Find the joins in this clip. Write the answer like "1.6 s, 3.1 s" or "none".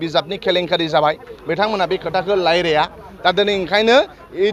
none